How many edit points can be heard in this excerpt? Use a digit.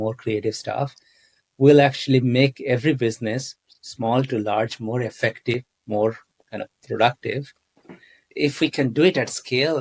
1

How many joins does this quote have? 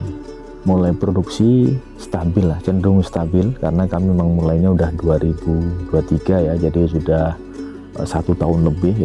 0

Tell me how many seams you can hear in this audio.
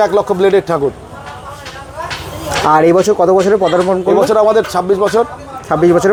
0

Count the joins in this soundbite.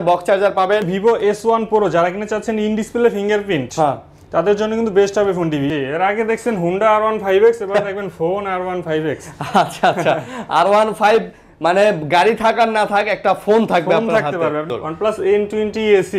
3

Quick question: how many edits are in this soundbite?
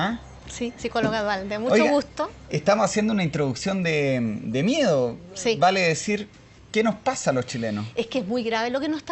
1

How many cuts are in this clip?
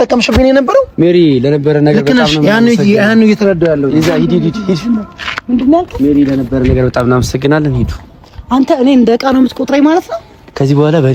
0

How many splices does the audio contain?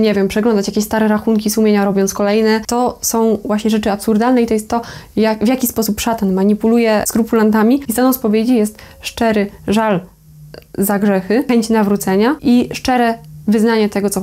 5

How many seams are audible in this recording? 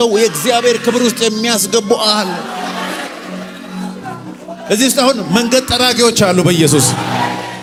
0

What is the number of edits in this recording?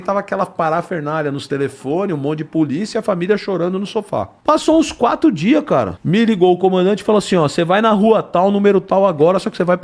2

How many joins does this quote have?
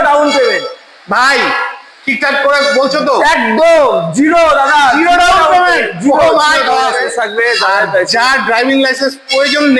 1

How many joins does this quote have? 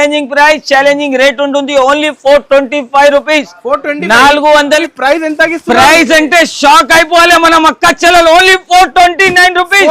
1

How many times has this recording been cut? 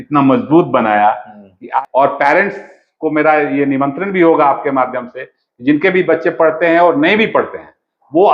1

